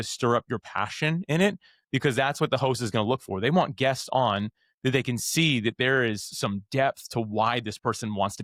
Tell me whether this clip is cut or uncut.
uncut